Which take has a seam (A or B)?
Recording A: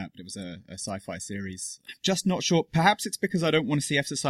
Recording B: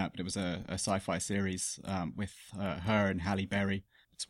A